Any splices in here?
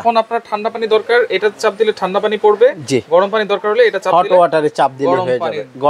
no; 0 cuts

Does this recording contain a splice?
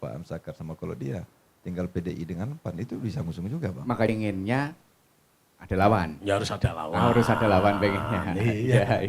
yes; 1 cut; at 4.1 s

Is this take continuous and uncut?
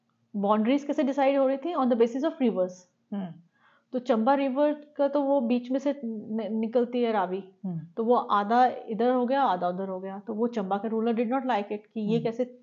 yes; 0 cuts

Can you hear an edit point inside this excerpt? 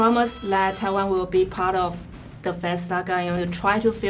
no; 0 cuts

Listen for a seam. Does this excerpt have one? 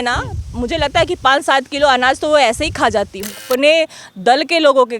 yes; 1 cut; at 3.4 s

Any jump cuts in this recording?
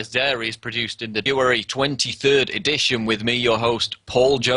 no; 0 cuts

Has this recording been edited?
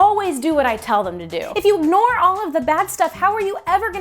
yes; 1 cut; at 1.4 s

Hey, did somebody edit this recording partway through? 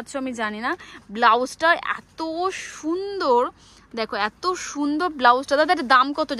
no; 0 cuts

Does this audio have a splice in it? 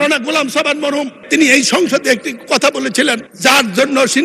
no; 0 cuts

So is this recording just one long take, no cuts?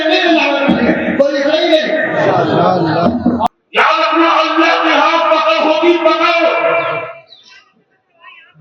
no; 1 cut; at 3.5 s

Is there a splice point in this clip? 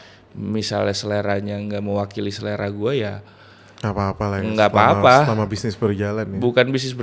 no; 0 cuts

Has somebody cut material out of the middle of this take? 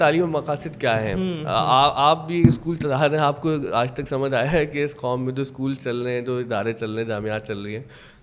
no; 0 cuts

